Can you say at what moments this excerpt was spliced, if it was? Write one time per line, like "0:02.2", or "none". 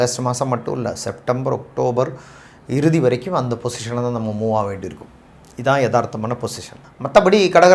none